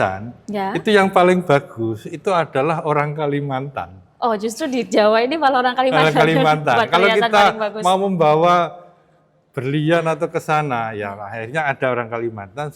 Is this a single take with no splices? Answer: yes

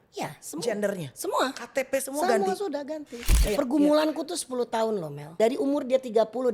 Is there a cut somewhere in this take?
yes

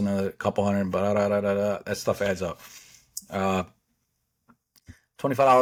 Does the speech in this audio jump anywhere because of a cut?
no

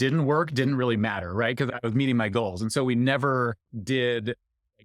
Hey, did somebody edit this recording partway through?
yes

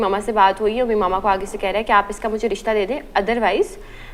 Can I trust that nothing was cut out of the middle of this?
yes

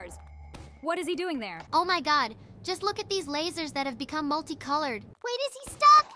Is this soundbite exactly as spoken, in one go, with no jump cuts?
no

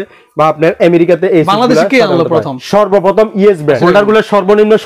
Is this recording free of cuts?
no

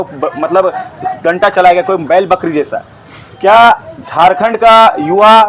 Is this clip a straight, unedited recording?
yes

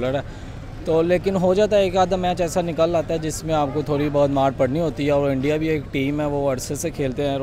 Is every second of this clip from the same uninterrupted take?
yes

